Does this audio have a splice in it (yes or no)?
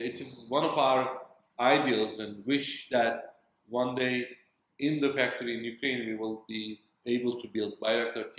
no